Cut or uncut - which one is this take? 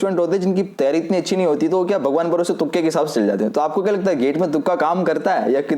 uncut